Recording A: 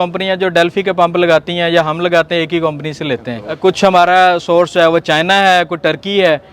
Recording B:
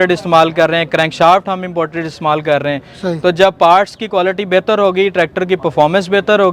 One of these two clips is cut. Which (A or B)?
A